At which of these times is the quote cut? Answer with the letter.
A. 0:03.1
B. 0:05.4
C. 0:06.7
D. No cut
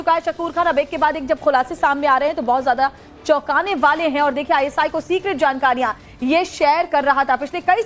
B